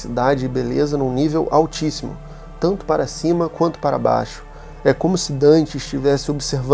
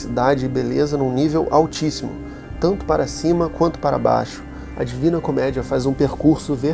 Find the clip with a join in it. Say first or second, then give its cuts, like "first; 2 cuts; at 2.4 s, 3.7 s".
second; 1 cut; at 4.7 s